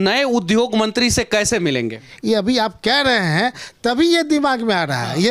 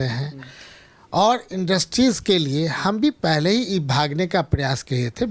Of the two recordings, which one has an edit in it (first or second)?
first